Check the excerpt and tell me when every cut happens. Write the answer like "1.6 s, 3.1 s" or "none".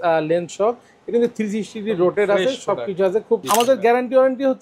3.4 s